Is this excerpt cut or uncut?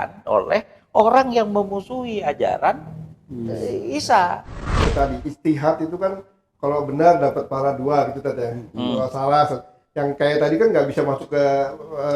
cut